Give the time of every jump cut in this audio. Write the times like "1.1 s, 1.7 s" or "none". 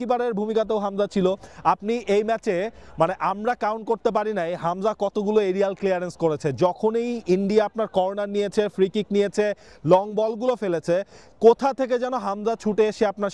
none